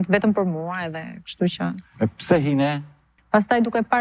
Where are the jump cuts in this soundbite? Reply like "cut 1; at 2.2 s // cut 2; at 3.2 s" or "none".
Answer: cut 1; at 3.1 s